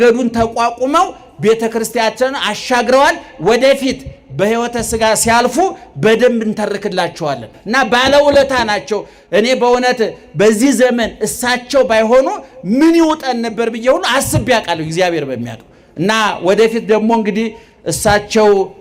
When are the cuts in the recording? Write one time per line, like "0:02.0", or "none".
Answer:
0:07.5